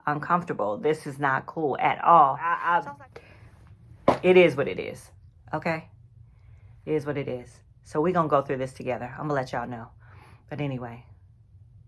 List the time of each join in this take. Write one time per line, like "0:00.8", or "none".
0:02.6